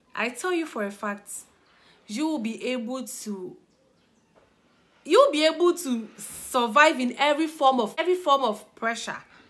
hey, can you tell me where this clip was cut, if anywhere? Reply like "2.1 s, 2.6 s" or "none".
8.0 s